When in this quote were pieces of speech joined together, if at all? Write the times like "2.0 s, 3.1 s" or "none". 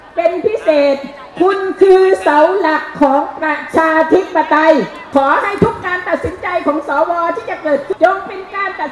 5.0 s, 7.9 s